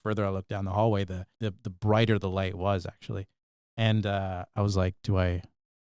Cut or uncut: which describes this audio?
cut